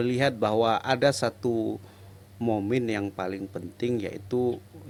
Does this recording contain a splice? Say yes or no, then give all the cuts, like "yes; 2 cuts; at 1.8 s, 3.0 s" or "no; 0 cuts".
no; 0 cuts